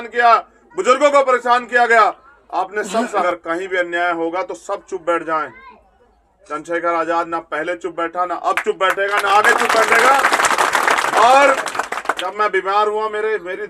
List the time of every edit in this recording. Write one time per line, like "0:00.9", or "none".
0:03.2
0:12.2